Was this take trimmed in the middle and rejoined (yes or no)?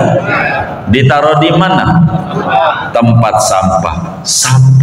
no